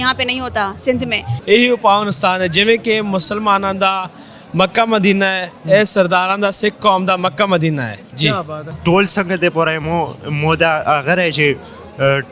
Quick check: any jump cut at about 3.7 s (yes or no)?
no